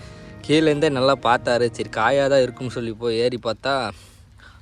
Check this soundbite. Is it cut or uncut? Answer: uncut